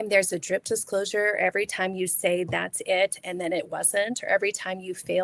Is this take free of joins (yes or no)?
yes